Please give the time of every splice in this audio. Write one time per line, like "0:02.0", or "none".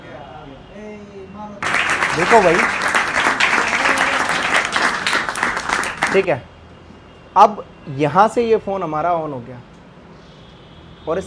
none